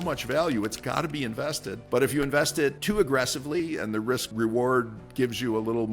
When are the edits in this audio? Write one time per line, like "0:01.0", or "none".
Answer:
0:01.7
0:02.8
0:04.3